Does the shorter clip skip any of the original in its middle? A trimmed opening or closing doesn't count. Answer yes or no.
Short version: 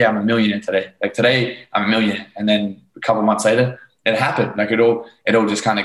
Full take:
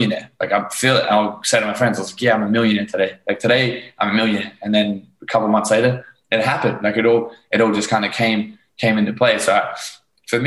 no